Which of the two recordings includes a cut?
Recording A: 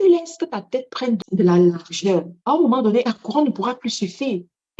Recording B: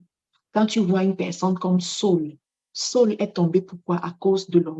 A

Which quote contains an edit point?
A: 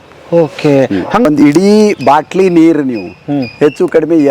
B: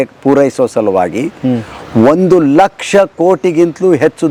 A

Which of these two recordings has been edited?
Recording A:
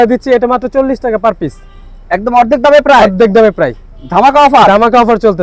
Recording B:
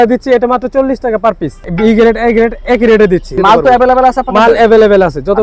B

